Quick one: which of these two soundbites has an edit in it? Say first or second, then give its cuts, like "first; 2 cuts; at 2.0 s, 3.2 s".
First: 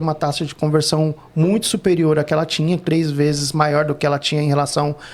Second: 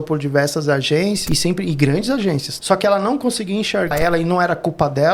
second; 3 cuts; at 1.2 s, 2.5 s, 3.9 s